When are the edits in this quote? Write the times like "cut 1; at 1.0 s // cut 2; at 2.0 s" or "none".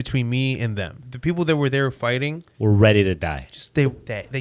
cut 1; at 1.0 s

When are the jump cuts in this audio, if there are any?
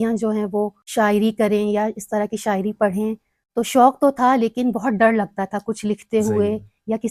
none

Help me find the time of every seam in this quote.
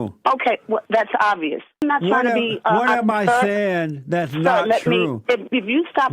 cut 1; at 1.8 s

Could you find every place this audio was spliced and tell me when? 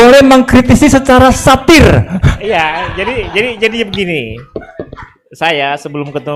none

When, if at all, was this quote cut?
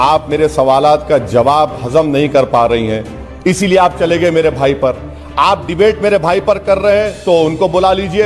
none

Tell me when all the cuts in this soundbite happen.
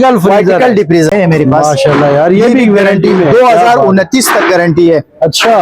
cut 1; at 1.1 s

